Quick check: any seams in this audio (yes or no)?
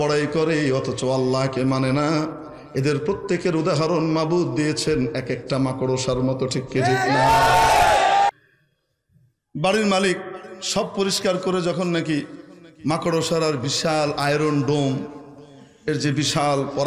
yes